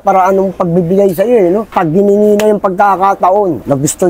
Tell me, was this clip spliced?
yes; 1 cut; at 1.7 s

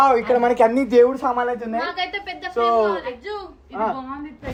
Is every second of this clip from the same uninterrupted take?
yes; 0 cuts

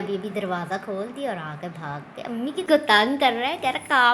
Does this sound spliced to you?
yes; 1 cut; at 2.7 s

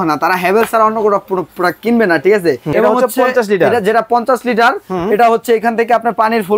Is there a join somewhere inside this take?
yes; 1 cut; at 2.7 s

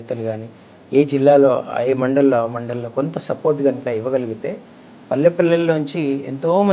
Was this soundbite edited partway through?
no; 0 cuts

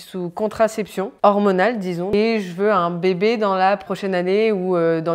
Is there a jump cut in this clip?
yes; 2 cuts; at 2.1 s, 3.9 s

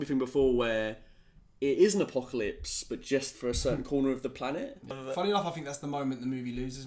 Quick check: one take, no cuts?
no; 1 cut; at 5.0 s

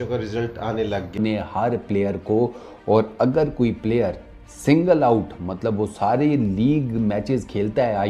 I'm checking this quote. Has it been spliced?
yes; 1 cut; at 1.2 s

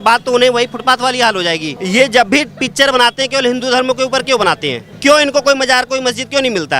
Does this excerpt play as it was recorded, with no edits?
no; 2 cuts; at 1.7 s, 4.9 s

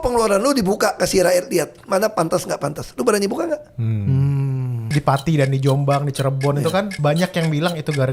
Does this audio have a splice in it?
yes; 2 cuts; at 4.8 s, 6.9 s

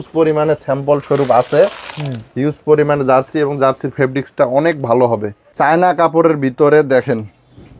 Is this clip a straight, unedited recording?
no; 1 cut; at 5.4 s

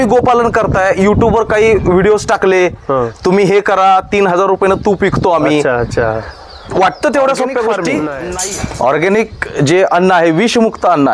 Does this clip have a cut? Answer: yes; 1 cut; at 8.2 s

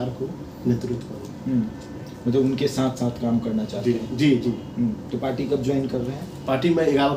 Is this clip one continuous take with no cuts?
yes; 0 cuts

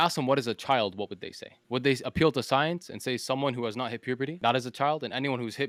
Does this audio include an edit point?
no; 0 cuts

